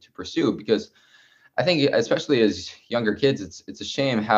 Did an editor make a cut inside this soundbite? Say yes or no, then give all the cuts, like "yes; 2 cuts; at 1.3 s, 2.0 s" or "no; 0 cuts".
no; 0 cuts